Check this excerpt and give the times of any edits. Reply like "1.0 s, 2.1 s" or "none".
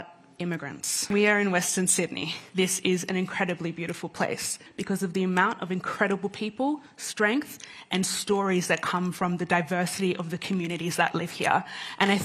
1.0 s, 2.3 s, 4.7 s